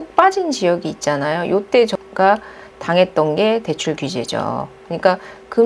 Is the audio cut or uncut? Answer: uncut